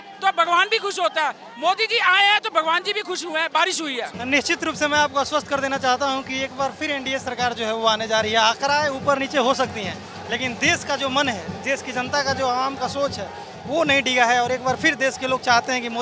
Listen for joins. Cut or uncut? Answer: cut